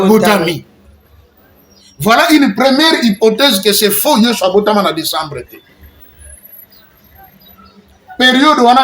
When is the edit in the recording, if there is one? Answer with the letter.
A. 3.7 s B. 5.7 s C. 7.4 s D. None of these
D